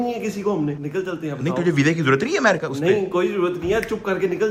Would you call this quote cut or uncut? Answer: uncut